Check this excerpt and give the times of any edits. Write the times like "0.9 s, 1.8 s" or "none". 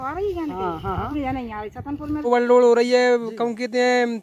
2.3 s